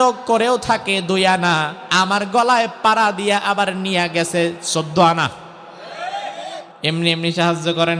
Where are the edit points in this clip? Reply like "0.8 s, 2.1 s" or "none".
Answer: 1.8 s, 6.7 s